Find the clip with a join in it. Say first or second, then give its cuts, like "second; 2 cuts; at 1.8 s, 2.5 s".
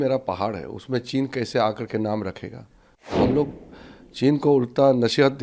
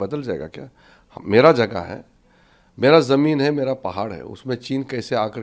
first; 1 cut; at 3.1 s